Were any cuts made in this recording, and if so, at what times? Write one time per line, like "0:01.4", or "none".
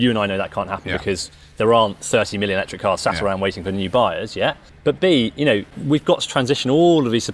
0:04.7
0:05.7